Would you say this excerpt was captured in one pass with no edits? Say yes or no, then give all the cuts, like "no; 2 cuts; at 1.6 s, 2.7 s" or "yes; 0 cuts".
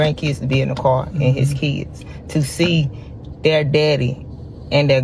yes; 0 cuts